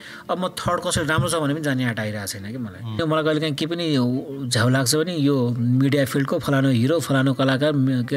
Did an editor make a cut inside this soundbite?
yes; 1 cut; at 3.0 s

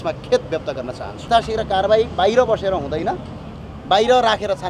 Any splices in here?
yes; 1 cut; at 1.3 s

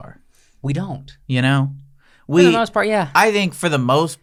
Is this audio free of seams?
yes; 0 cuts

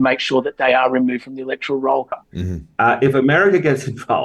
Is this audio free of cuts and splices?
no; 1 cut; at 2.2 s

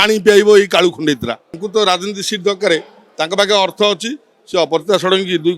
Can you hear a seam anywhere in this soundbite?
yes; 1 cut; at 1.6 s

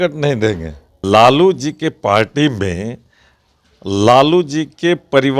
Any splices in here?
yes; 1 cut; at 0.9 s

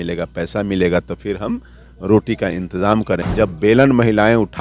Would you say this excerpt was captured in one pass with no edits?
no; 1 cut; at 3.2 s

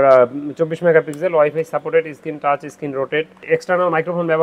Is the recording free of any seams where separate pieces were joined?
no; 1 cut; at 3.4 s

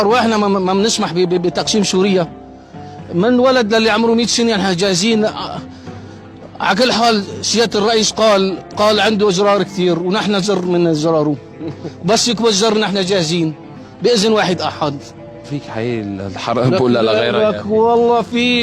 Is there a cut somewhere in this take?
yes; 1 cut; at 15.5 s

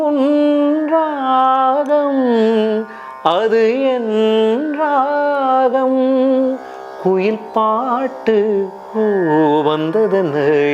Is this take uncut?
yes; 0 cuts

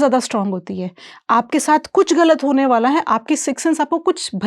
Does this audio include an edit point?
no; 0 cuts

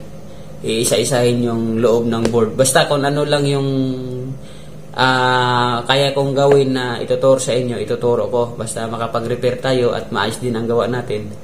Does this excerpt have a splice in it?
no; 0 cuts

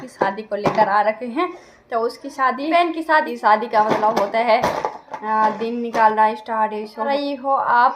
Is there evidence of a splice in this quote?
yes; 2 cuts; at 3.2 s, 7.1 s

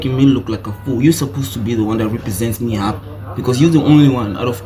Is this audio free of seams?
yes; 0 cuts

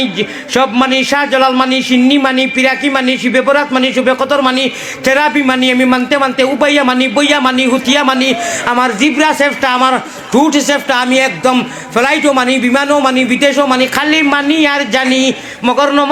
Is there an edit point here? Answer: no; 0 cuts

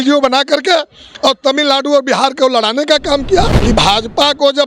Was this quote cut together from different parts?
yes; 1 cut; at 3.6 s

